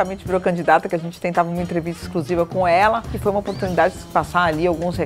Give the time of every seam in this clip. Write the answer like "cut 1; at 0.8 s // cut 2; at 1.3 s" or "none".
cut 1; at 3.1 s // cut 2; at 4.0 s